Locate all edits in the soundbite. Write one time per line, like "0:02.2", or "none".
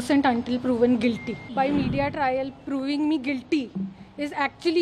0:01.5